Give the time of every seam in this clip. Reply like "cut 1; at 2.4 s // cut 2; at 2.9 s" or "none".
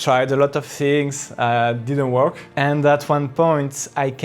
cut 1; at 2.4 s